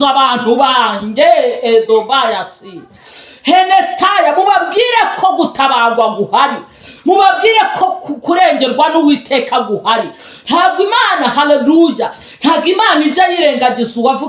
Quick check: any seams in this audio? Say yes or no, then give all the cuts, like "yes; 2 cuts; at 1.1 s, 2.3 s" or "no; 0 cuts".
no; 0 cuts